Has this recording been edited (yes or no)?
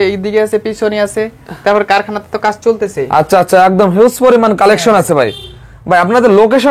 no